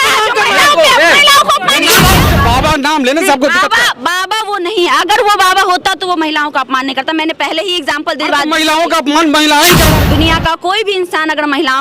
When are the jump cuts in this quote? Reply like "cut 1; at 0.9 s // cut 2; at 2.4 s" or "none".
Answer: cut 1; at 2.2 s // cut 2; at 9.9 s